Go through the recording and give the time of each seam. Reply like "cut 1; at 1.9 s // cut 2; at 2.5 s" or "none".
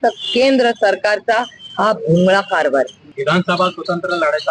cut 1; at 3.0 s